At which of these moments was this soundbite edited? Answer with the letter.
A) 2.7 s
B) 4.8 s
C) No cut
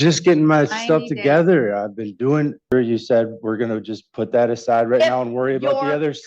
A